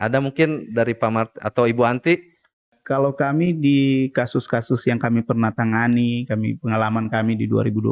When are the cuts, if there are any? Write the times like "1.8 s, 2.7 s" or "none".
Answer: 2.7 s